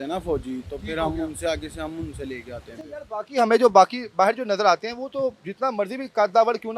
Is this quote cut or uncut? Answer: uncut